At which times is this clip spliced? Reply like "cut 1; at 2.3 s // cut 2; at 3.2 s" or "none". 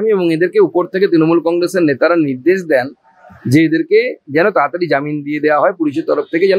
none

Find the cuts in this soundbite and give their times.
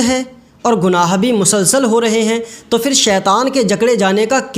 none

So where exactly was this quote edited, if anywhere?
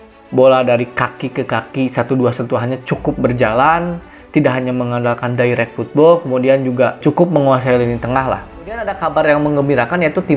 cut 1; at 7.0 s // cut 2; at 8.6 s

